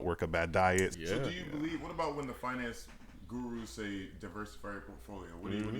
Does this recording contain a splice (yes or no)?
yes